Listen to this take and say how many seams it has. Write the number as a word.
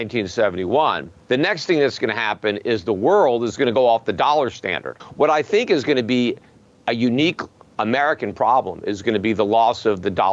two